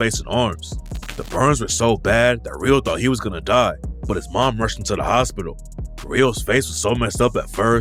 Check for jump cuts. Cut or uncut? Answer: uncut